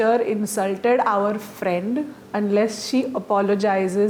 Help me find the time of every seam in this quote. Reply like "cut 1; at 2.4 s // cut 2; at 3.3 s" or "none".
none

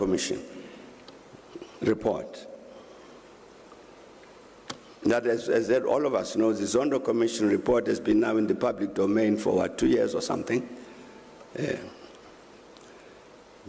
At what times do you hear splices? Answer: none

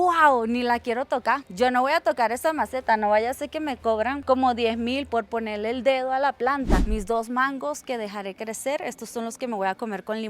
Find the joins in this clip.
cut 1; at 6.8 s

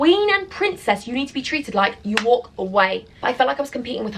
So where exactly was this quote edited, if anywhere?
cut 1; at 3.1 s

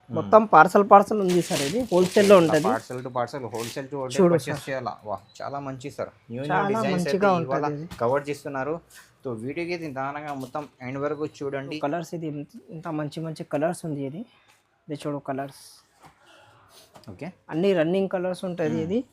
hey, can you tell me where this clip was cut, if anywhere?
cut 1; at 11.8 s

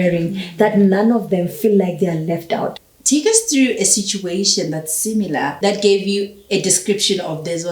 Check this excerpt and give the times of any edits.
cut 1; at 2.9 s // cut 2; at 5.6 s

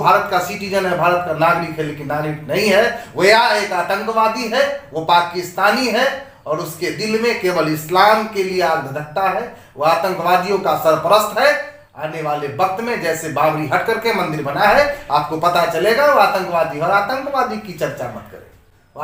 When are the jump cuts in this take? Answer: none

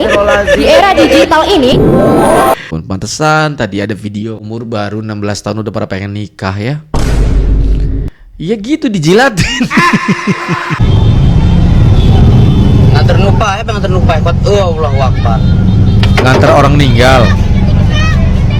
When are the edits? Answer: cut 1; at 2.8 s // cut 2; at 10.8 s

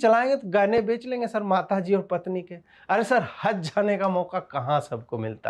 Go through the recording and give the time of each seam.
none

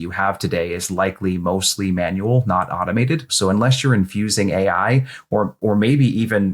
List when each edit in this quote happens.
cut 1; at 3.3 s

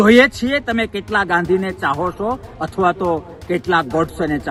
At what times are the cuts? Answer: none

